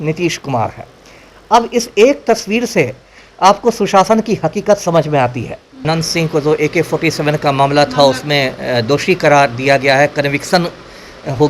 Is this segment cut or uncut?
cut